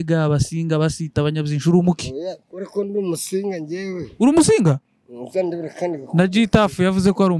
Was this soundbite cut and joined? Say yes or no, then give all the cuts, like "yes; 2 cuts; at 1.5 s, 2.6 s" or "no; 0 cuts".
no; 0 cuts